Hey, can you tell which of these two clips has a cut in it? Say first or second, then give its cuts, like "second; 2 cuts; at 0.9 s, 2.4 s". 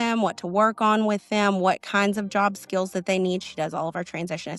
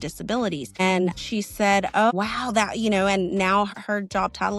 second; 3 cuts; at 1.1 s, 2.1 s, 3.7 s